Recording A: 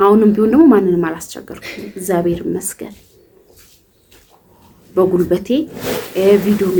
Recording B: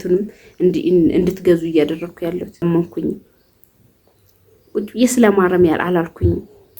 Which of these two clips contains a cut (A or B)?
B